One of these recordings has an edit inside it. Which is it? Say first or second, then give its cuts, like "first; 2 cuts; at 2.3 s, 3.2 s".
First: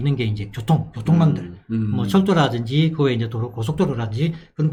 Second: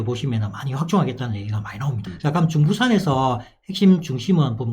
second; 1 cut; at 2.1 s